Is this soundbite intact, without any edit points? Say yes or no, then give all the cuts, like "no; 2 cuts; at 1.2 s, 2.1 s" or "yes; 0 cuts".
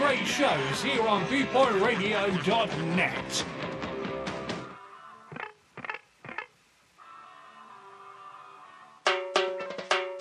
no; 1 cut; at 9.0 s